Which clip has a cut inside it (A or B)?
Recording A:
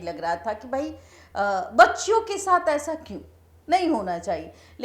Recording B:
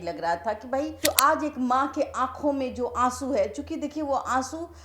B